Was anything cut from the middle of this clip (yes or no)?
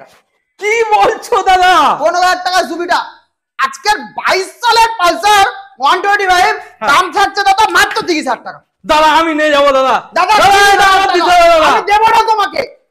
yes